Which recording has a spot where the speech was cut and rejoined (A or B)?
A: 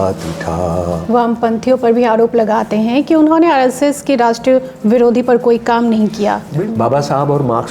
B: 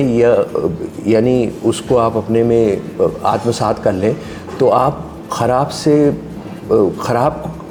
A